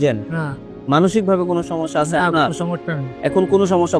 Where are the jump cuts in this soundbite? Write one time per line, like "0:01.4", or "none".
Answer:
none